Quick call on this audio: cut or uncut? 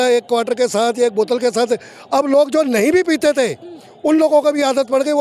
uncut